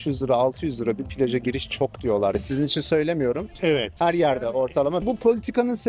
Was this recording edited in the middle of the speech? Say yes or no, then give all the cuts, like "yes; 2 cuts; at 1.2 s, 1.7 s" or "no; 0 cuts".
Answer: yes; 1 cut; at 5.0 s